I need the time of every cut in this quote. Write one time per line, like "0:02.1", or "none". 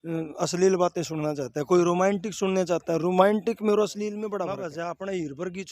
0:04.5